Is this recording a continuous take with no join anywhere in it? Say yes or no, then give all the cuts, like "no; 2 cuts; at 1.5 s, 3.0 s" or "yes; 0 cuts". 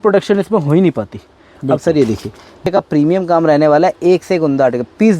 no; 1 cut; at 2.6 s